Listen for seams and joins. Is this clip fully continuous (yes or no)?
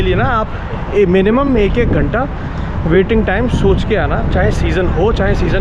yes